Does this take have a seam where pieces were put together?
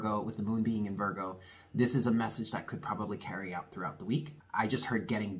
yes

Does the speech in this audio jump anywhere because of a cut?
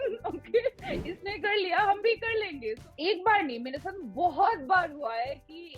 yes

